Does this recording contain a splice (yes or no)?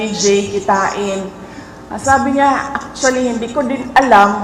no